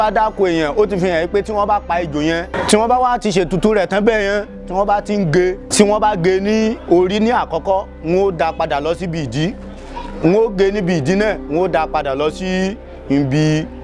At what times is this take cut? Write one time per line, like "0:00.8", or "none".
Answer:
0:02.6
0:05.6